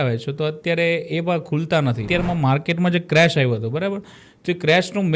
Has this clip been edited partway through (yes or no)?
yes